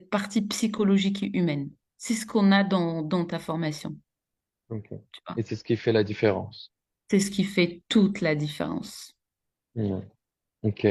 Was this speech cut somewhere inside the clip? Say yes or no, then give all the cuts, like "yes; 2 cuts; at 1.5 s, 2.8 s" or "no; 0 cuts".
no; 0 cuts